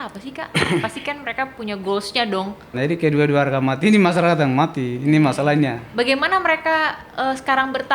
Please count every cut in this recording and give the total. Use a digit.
2